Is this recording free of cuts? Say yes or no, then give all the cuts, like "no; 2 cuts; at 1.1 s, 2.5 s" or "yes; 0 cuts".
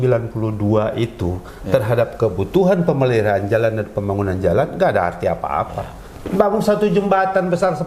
yes; 0 cuts